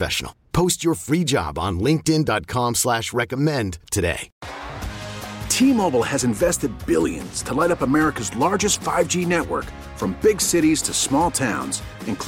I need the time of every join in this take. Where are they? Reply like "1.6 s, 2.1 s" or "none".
4.3 s